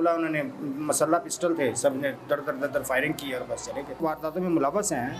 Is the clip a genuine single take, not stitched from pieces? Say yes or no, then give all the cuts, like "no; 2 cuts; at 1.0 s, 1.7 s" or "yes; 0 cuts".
no; 1 cut; at 4.0 s